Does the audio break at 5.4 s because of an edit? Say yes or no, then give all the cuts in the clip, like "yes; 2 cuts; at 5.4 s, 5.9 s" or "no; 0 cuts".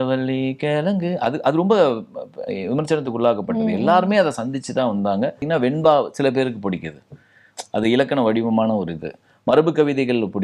yes; 1 cut; at 5.4 s